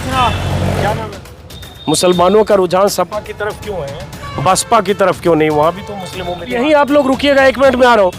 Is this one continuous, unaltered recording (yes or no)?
no